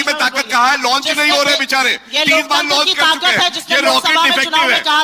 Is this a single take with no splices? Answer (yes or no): yes